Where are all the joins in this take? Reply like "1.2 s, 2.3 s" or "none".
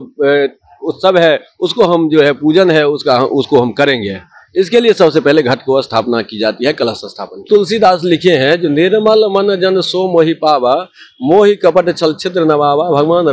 7.5 s